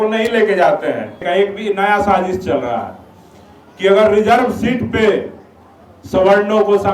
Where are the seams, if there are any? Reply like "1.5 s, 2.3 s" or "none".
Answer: 1.2 s